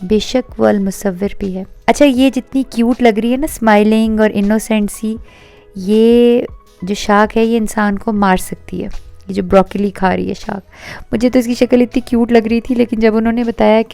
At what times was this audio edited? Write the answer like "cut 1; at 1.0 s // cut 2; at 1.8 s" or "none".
cut 1; at 1.7 s